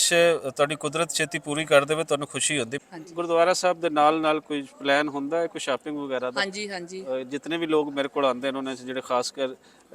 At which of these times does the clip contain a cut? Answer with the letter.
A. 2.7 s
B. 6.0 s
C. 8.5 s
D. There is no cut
A